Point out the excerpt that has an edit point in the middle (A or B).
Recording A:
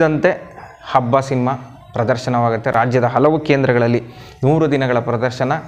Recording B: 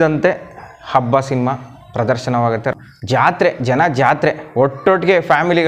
B